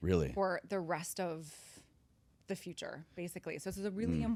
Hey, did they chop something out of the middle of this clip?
no; 0 cuts

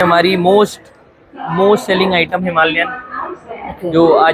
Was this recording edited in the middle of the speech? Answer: no; 0 cuts

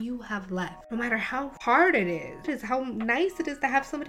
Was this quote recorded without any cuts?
no; 2 cuts; at 1.5 s, 2.5 s

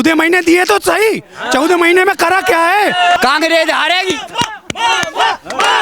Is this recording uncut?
no; 1 cut; at 3.2 s

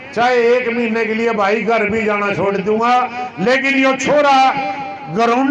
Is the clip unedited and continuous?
yes; 0 cuts

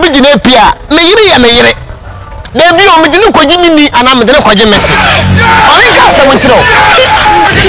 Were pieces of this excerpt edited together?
no; 0 cuts

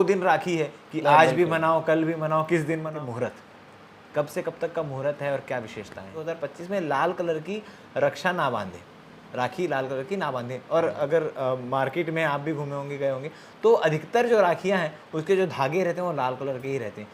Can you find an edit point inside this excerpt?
yes; 2 cuts; at 2.9 s, 6.2 s

